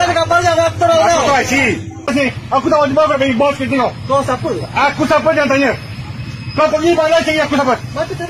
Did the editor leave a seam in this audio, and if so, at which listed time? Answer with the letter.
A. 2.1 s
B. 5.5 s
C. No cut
A